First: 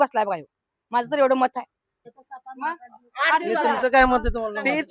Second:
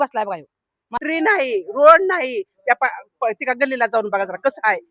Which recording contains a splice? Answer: second; 1 cut; at 1.0 s

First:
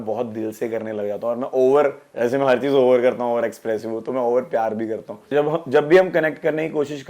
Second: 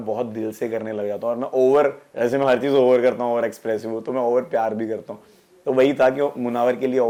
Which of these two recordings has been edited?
first; 1 cut; at 5.2 s

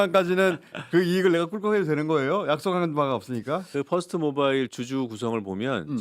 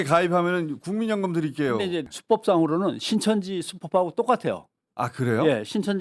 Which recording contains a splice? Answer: second; 1 cut; at 2.1 s

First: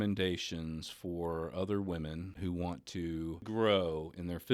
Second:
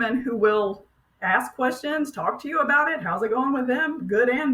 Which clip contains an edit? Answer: first; 2 cuts; at 2.3 s, 3.4 s

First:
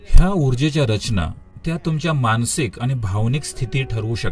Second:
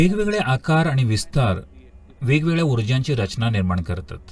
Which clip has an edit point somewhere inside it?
first; 1 cut; at 1.5 s

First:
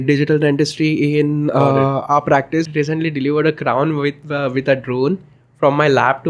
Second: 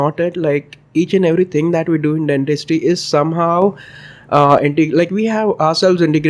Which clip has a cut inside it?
first; 1 cut; at 2.7 s

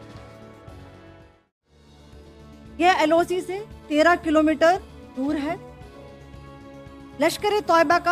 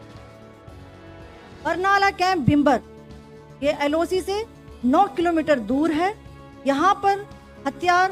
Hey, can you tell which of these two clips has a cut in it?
second; 1 cut; at 1.5 s

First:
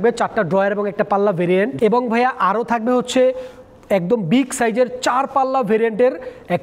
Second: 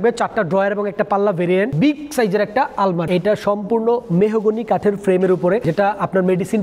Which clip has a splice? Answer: second; 3 cuts; at 1.7 s, 3.1 s, 5.6 s

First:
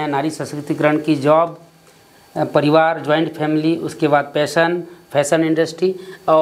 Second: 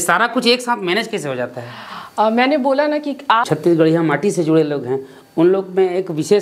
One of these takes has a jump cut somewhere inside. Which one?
second; 1 cut; at 3.4 s

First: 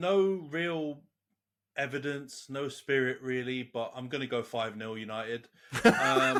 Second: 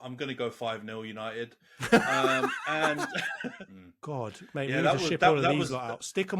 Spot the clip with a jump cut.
second; 1 cut; at 3.6 s

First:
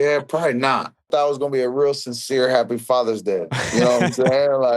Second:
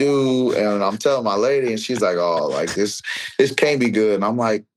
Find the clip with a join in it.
first; 1 cut; at 1.0 s

